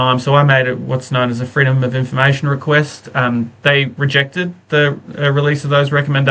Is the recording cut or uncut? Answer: uncut